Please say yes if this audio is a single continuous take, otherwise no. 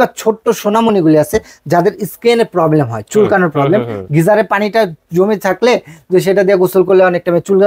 yes